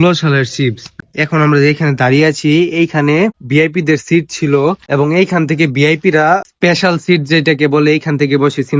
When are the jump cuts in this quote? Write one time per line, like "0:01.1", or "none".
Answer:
0:01.0
0:03.4
0:04.8
0:06.5